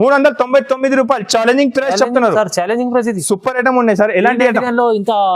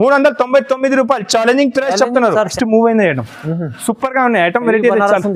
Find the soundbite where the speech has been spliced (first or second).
second